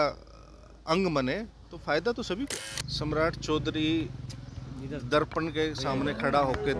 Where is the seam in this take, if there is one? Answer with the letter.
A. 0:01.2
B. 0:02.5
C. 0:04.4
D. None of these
B